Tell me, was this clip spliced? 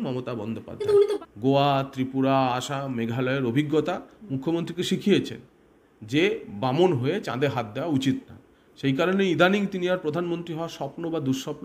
yes; 1 cut; at 1.3 s

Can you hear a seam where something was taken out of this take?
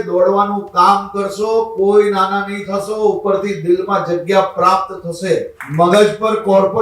yes; 1 cut; at 5.6 s

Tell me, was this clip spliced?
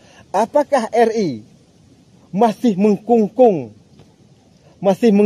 no; 0 cuts

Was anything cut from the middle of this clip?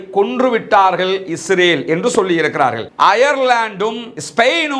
yes; 1 cut; at 2.8 s

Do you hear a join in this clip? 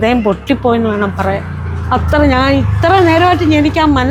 no; 0 cuts

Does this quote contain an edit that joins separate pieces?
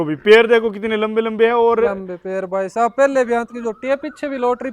no; 0 cuts

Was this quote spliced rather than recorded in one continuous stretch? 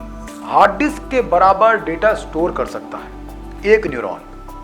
no; 0 cuts

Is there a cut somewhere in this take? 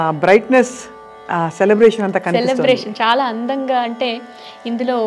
no; 0 cuts

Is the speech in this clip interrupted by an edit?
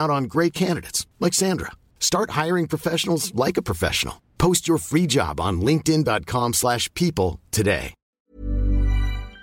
yes; 1 cut; at 8.0 s

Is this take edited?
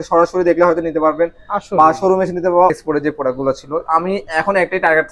yes; 1 cut; at 2.7 s

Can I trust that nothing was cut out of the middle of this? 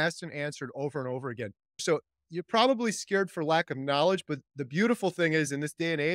no; 1 cut; at 1.8 s

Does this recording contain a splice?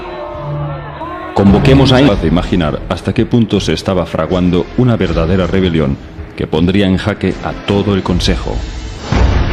no; 0 cuts

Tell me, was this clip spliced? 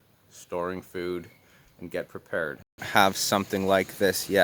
yes; 1 cut; at 2.8 s

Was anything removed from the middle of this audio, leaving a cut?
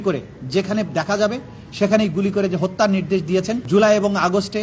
yes; 1 cut; at 3.6 s

